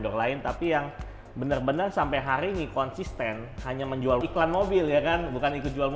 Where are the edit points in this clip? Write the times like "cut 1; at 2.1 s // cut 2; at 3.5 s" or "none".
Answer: cut 1; at 4.2 s